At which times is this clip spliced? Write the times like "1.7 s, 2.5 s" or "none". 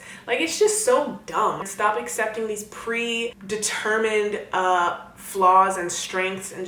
1.7 s, 3.4 s